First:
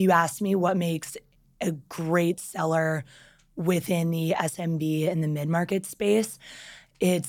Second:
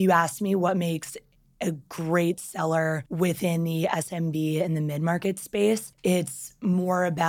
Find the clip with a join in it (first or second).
second